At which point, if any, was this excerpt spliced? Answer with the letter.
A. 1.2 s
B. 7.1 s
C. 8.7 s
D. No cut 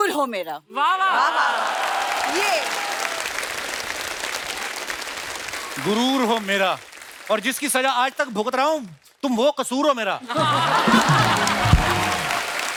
D